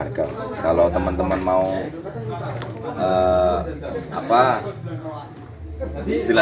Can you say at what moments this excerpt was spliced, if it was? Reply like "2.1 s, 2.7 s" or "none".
none